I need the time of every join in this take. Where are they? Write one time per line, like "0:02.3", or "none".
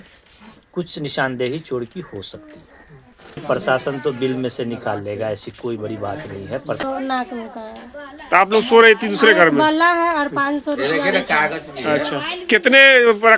0:03.4
0:06.8